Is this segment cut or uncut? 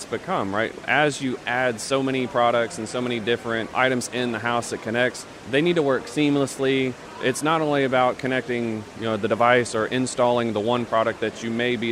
cut